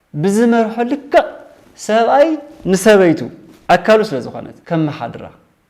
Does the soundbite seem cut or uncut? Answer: cut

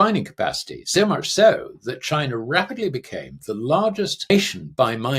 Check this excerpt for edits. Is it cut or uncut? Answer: cut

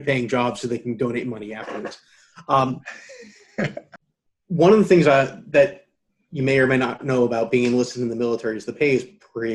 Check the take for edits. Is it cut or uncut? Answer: cut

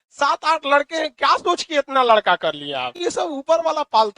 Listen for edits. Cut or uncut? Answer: cut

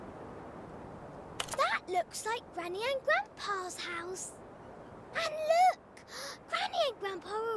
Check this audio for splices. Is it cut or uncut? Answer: cut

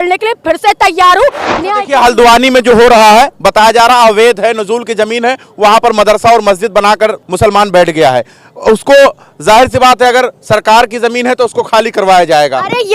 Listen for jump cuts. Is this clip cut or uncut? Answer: cut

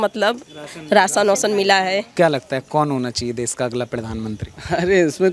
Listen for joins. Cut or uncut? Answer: cut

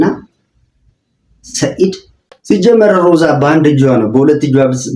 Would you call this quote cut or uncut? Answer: cut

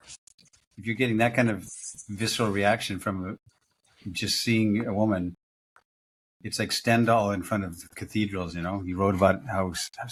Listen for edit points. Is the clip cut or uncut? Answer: uncut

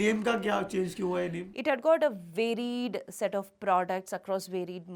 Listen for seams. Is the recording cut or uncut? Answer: cut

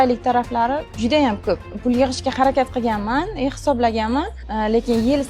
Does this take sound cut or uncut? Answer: cut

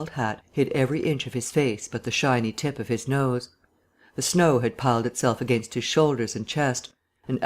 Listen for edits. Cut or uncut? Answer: cut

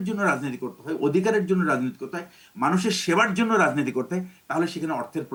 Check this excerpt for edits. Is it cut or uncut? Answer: uncut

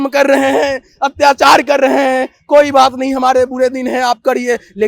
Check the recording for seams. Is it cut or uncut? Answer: uncut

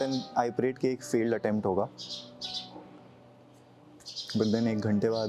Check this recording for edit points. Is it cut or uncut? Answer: uncut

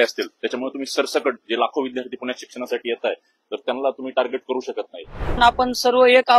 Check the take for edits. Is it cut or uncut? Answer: cut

